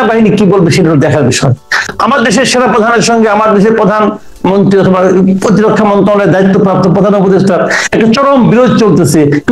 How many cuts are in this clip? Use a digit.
1